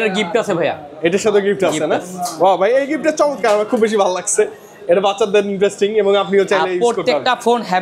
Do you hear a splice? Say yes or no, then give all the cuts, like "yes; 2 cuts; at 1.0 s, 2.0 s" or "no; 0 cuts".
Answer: no; 0 cuts